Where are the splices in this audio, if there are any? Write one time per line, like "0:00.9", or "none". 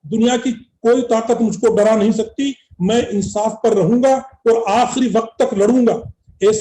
none